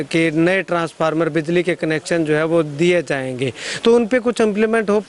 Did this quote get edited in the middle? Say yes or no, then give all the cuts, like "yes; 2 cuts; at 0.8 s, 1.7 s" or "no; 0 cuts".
no; 0 cuts